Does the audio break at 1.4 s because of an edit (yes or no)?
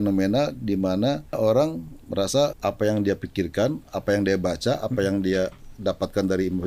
yes